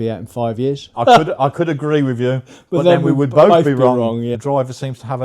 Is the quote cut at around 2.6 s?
no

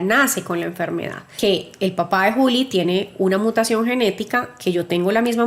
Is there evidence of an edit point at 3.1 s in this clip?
no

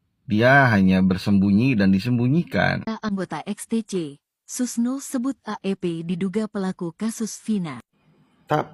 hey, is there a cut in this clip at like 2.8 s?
yes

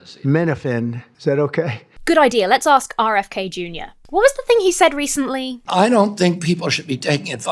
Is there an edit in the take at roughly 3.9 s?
no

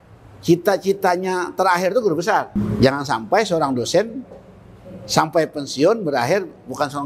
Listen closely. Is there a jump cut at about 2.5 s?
yes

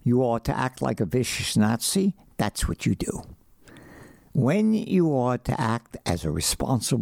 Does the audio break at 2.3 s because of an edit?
no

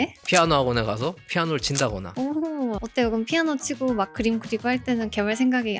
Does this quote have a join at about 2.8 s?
yes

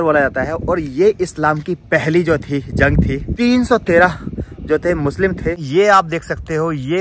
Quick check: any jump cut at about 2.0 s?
no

